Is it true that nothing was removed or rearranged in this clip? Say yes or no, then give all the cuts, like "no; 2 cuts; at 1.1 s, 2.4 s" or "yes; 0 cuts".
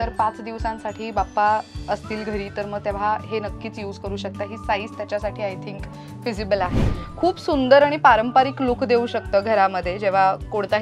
no; 1 cut; at 6.9 s